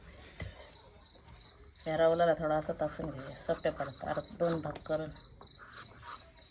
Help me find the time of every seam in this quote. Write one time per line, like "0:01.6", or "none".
none